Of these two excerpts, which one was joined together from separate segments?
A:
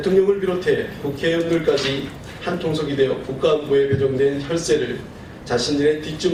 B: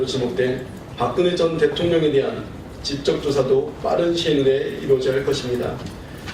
B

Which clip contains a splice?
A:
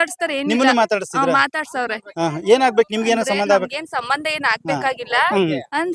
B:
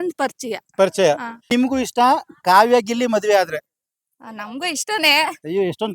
B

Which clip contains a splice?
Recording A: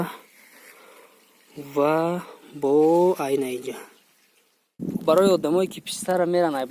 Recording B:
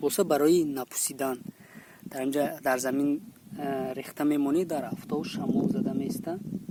A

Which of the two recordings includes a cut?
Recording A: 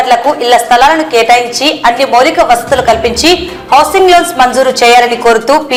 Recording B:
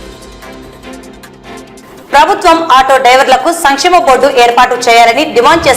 B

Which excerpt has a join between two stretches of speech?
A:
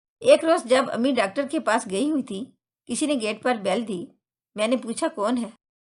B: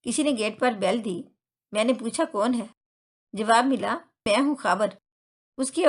B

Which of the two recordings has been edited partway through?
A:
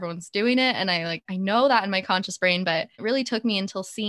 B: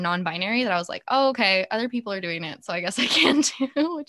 A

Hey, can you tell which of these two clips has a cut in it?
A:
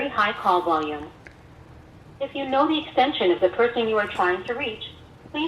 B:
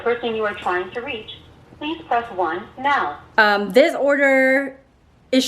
B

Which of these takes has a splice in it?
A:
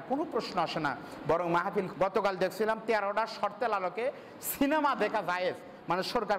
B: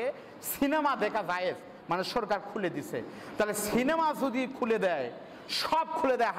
A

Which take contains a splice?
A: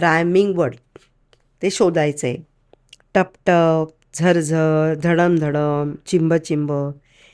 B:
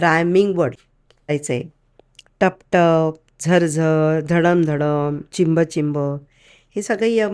B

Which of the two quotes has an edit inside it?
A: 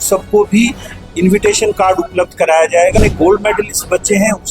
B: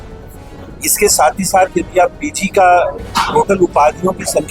A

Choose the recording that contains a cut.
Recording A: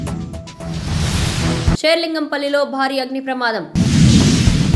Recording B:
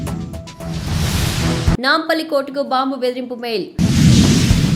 B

